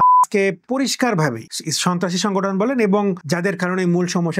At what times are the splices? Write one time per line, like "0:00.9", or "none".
none